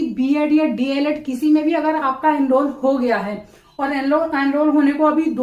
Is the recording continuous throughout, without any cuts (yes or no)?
yes